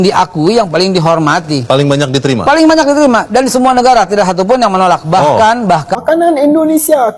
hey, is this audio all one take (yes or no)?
no